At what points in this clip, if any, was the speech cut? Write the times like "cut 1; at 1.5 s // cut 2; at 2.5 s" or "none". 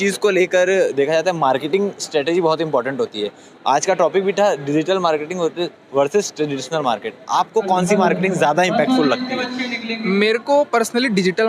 none